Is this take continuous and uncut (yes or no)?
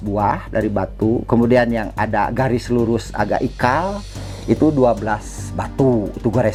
yes